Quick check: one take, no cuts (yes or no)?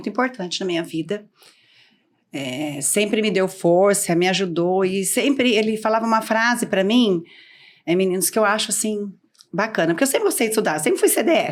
yes